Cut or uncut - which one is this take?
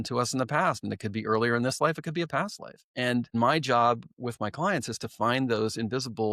cut